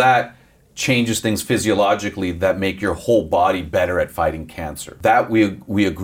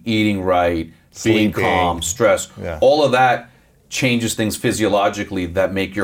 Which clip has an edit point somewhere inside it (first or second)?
first